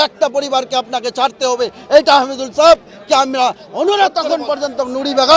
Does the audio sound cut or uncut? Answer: cut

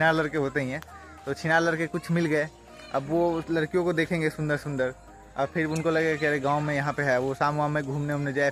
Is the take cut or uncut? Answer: uncut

